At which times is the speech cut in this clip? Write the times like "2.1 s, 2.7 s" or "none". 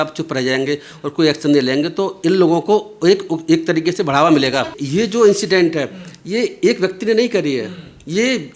4.8 s